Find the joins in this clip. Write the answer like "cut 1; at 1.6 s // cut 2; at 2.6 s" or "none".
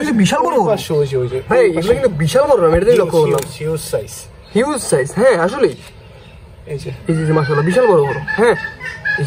none